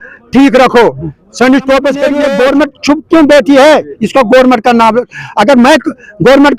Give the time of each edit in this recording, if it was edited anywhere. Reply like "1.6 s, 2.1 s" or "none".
2.2 s